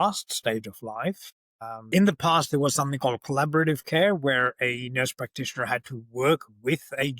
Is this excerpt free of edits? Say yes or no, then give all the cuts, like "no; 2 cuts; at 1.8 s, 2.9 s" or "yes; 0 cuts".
no; 1 cut; at 1.8 s